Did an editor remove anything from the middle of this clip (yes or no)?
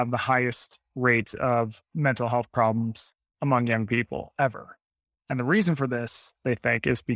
no